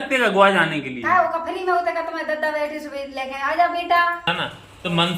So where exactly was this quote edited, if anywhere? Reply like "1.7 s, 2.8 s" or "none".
4.3 s